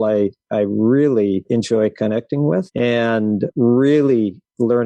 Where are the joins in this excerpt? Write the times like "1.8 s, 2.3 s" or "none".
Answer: 1.5 s, 3.0 s